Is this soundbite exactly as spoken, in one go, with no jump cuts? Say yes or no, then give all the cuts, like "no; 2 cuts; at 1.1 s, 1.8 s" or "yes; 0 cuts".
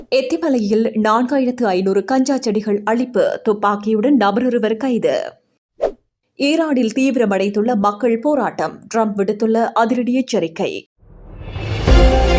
no; 1 cut; at 10.8 s